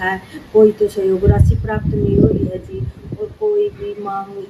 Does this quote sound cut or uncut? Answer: uncut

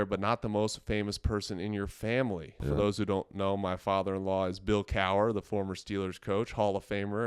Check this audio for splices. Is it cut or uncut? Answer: cut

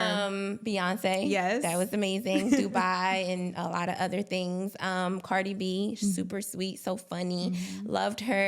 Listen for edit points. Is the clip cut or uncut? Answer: uncut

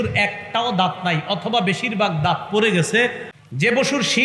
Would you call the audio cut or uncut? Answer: cut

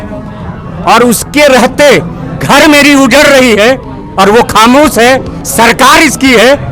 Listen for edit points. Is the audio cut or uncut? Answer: uncut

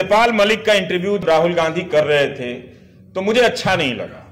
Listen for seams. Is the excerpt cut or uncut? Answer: cut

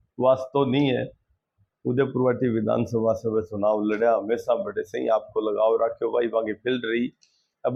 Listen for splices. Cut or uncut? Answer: uncut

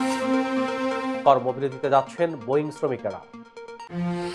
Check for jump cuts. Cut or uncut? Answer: uncut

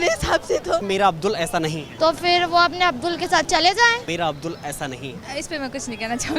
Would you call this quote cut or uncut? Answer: cut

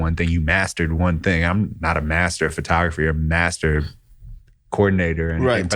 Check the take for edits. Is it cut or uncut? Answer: uncut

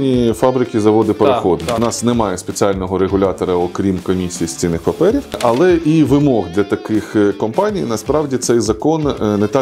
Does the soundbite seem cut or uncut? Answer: cut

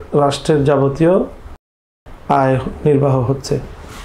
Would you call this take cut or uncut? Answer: uncut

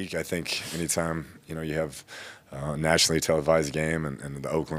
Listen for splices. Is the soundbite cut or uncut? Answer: uncut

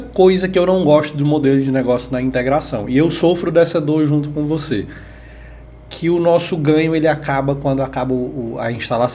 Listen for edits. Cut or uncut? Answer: uncut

